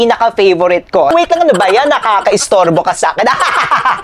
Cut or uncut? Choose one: cut